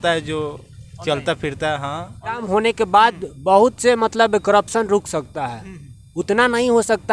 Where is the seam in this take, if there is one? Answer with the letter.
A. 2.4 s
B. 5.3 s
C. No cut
A